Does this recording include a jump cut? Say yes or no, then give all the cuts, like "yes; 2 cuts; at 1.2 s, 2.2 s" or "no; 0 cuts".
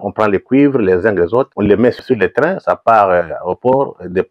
yes; 1 cut; at 2.0 s